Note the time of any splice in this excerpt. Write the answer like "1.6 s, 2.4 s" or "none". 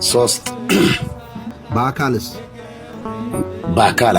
1.6 s, 2.9 s